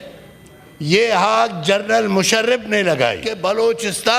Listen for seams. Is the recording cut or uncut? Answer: cut